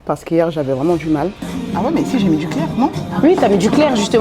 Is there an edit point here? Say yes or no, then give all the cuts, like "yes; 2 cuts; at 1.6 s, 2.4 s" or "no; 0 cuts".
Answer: yes; 1 cut; at 1.6 s